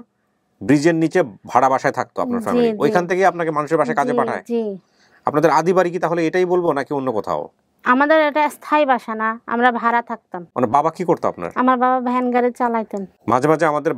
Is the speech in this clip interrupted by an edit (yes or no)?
yes